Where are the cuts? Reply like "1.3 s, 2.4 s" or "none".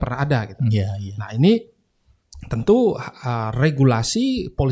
none